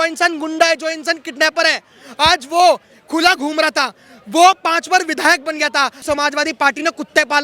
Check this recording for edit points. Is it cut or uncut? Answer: cut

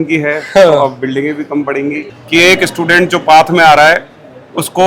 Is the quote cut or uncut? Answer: cut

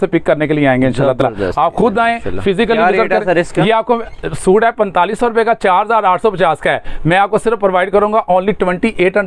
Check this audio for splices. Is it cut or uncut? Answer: uncut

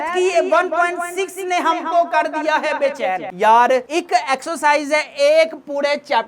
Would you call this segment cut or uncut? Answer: uncut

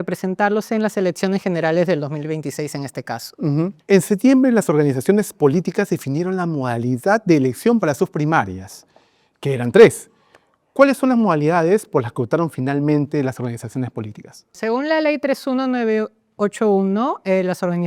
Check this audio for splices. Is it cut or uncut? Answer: uncut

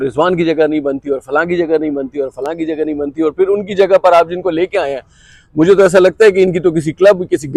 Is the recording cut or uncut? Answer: uncut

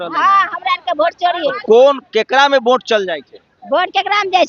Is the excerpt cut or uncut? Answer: uncut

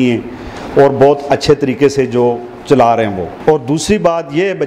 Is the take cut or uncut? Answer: cut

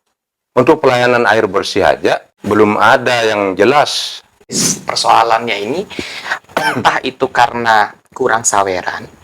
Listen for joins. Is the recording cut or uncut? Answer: cut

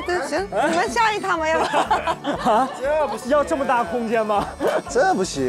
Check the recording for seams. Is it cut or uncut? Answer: uncut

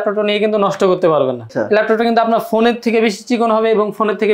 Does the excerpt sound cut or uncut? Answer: cut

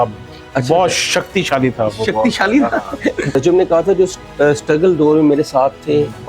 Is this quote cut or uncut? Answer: cut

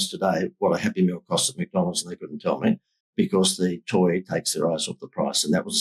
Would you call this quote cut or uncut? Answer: uncut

